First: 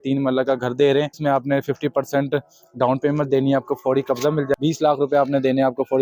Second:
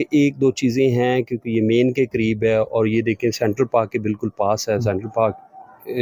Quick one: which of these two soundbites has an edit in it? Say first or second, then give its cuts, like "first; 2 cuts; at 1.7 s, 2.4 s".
first; 2 cuts; at 1.1 s, 4.5 s